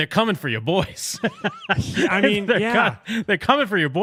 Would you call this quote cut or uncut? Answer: uncut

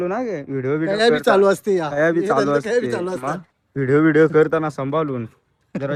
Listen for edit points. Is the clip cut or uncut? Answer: uncut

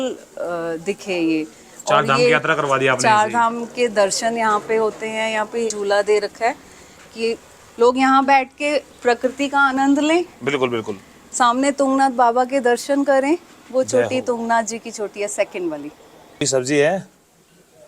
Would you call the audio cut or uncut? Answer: cut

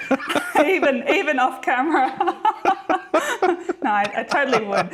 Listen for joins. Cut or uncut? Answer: uncut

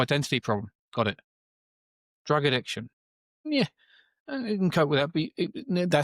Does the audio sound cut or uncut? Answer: uncut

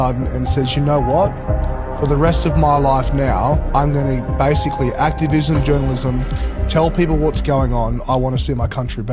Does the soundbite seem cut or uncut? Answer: uncut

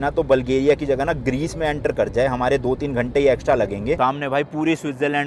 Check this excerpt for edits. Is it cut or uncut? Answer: cut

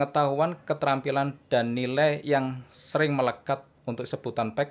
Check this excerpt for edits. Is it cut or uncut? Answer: cut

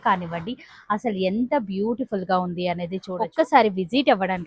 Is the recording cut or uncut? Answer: cut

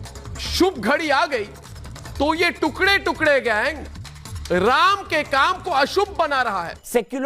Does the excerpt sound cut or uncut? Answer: uncut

